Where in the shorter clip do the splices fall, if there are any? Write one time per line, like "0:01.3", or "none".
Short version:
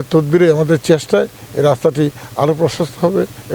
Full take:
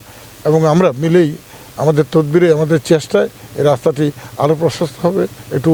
none